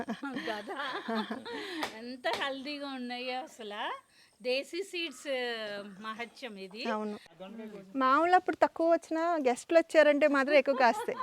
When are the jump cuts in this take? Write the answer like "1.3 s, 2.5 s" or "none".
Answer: 7.4 s